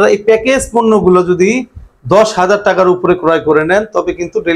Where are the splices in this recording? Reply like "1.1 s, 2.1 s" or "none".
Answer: none